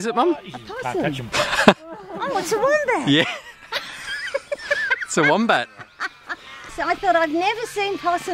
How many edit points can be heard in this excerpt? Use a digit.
1